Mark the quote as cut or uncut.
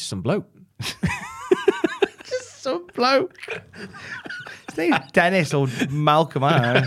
uncut